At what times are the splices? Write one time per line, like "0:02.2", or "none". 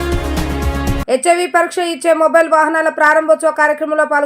0:01.0

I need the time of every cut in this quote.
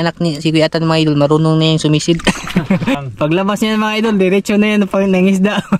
0:03.0

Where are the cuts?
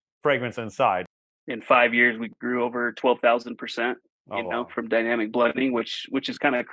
0:01.1

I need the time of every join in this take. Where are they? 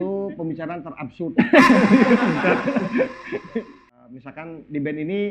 0:03.9

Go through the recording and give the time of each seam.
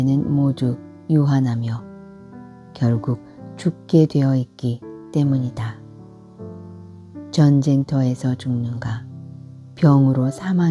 0:05.6
0:07.3

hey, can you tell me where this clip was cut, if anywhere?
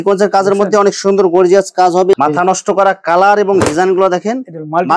0:02.1

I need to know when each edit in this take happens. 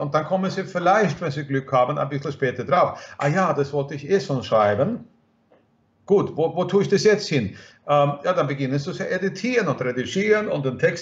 none

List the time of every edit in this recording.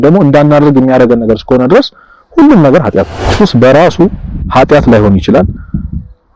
0:03.2

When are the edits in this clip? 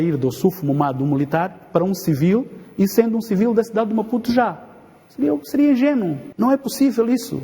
0:06.2

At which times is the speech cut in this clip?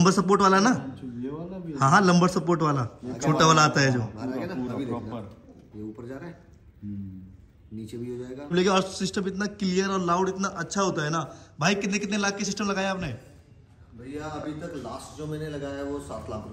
0:08.5

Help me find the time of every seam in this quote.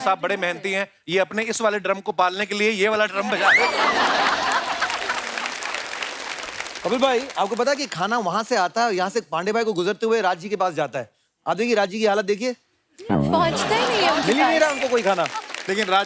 none

